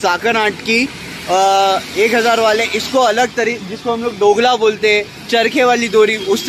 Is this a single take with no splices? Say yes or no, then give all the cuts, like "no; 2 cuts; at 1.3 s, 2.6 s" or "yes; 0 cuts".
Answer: yes; 0 cuts